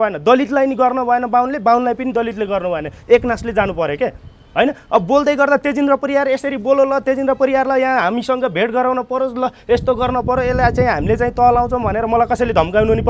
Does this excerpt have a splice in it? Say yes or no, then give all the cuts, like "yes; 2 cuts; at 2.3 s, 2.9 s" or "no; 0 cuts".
no; 0 cuts